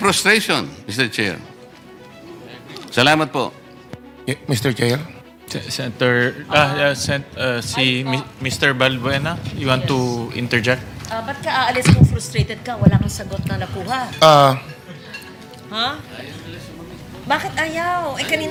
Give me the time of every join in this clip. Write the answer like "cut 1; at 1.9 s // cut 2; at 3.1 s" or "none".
none